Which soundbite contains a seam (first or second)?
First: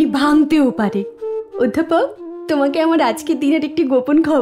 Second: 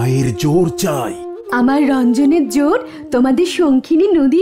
first